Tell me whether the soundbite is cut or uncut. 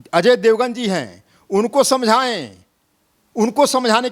uncut